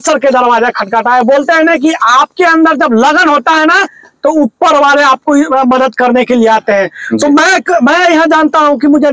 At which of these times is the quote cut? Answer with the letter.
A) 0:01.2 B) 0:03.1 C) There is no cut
C